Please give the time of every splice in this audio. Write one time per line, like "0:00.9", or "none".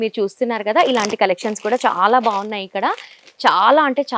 none